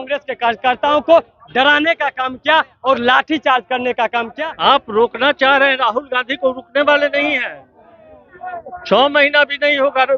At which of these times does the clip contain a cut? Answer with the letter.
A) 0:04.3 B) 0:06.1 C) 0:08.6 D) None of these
A